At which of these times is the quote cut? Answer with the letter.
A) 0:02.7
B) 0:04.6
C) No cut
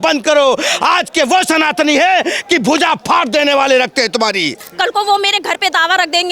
B